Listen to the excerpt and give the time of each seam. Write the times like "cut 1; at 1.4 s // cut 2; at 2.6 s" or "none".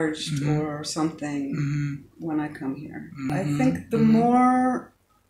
cut 1; at 3.2 s